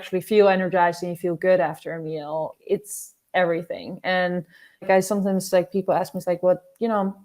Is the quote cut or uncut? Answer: cut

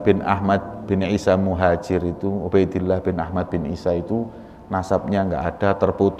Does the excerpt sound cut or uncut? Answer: uncut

